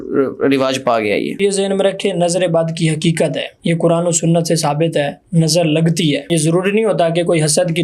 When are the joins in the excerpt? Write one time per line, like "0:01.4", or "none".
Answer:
0:01.4
0:03.5
0:06.3